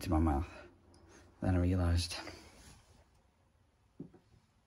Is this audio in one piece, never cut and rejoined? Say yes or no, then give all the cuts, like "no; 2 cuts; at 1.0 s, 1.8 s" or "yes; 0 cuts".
yes; 0 cuts